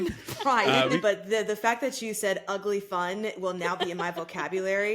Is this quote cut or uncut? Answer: cut